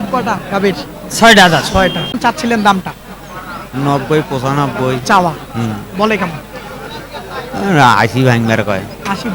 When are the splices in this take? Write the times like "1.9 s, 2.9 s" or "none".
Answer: 2.1 s

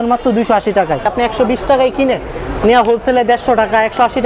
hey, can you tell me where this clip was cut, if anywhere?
1.1 s

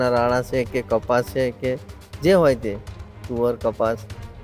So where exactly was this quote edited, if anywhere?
none

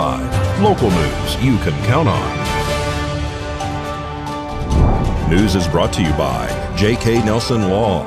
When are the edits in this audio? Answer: none

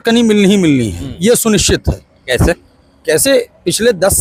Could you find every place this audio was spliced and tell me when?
none

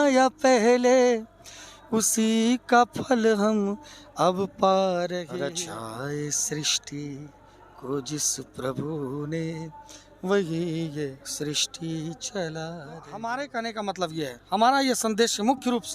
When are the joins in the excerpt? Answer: 5.3 s, 13.1 s

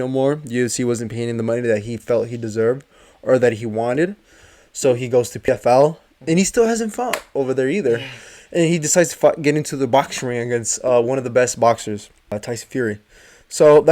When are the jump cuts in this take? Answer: 5.5 s, 12.3 s

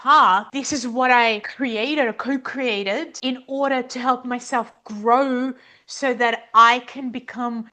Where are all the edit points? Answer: 1.4 s

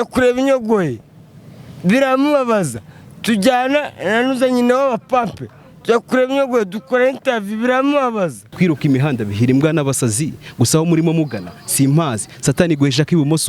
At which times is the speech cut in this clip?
8.4 s

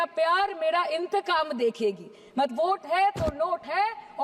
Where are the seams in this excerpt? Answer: 2.5 s

